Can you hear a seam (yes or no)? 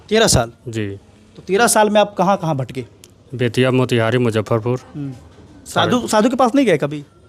no